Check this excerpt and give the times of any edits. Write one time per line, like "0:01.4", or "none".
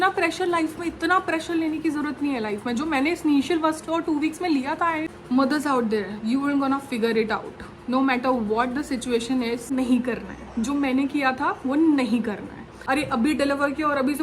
0:05.1
0:09.7
0:12.7